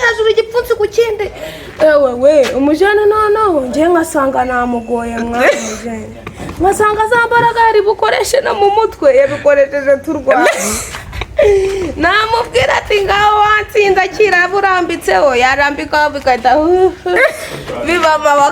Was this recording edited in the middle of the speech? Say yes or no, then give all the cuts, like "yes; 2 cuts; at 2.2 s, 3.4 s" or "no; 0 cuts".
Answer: no; 0 cuts